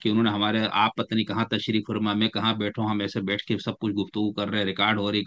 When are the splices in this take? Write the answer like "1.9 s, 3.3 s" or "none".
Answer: none